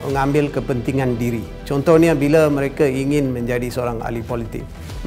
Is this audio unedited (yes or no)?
yes